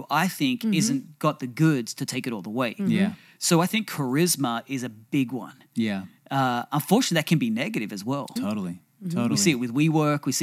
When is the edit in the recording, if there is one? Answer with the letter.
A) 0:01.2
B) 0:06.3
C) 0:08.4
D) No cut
C